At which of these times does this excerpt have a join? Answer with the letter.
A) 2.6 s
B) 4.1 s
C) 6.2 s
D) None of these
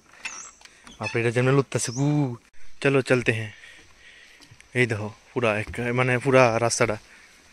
A